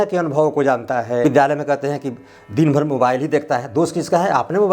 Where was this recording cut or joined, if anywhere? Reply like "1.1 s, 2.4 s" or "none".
1.3 s